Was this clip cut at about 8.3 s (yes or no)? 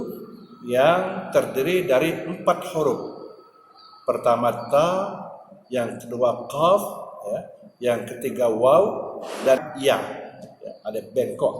no